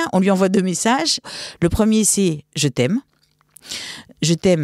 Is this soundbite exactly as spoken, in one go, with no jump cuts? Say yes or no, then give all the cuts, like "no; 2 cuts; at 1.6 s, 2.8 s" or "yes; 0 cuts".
no; 1 cut; at 1.3 s